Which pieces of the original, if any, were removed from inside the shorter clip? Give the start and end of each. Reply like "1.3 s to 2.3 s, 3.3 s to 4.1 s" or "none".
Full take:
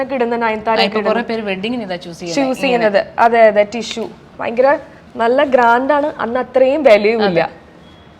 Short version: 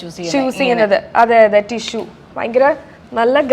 none